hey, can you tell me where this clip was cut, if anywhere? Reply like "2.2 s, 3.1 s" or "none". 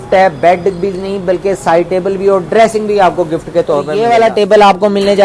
3.9 s